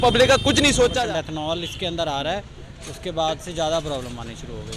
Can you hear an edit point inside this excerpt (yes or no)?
yes